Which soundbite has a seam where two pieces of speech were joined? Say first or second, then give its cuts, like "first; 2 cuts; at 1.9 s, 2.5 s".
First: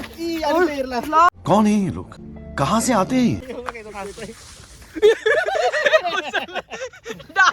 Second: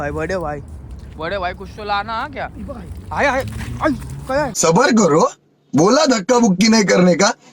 first; 1 cut; at 3.4 s